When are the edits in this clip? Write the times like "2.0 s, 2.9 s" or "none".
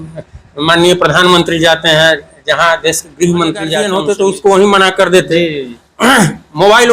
3.8 s